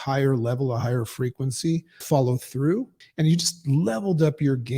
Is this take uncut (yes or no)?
no